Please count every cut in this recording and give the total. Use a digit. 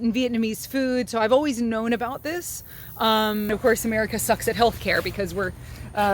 1